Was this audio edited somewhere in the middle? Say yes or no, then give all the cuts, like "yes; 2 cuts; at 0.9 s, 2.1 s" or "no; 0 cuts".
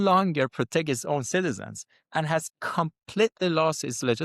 no; 0 cuts